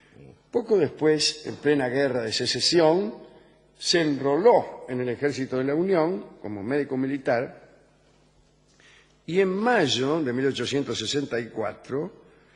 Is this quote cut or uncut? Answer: uncut